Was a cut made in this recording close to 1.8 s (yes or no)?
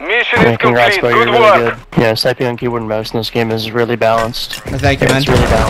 yes